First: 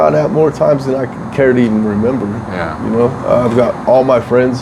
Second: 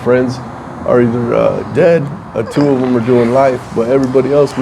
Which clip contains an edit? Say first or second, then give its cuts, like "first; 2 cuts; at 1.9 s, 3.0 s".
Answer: second; 1 cut; at 1.7 s